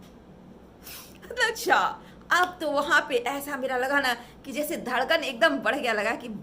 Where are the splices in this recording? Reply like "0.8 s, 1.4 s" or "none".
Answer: 1.6 s